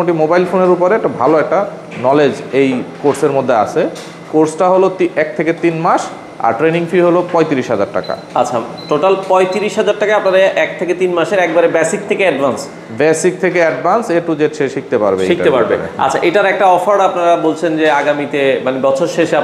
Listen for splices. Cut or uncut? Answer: uncut